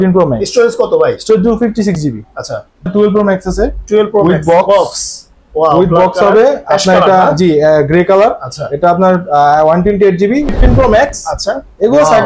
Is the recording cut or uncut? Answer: cut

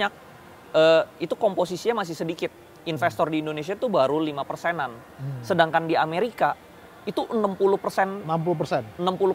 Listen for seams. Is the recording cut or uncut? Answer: uncut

